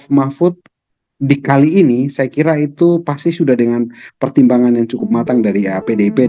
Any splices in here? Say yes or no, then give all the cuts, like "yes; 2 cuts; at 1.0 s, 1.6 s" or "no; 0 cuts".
no; 0 cuts